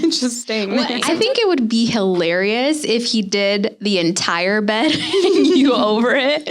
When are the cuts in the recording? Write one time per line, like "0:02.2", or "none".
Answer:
0:01.0

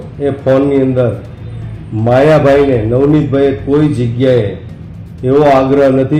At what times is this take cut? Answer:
none

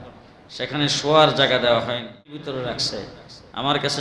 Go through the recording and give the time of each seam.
0:02.5

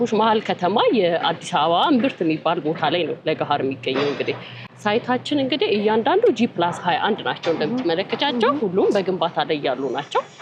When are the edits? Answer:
none

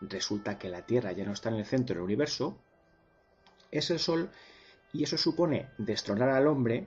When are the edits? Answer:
0:01.6

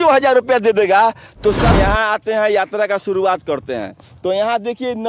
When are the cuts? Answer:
0:01.7

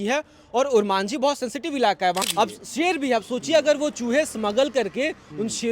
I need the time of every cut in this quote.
0:02.2

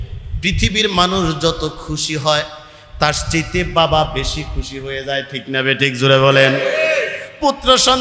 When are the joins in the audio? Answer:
none

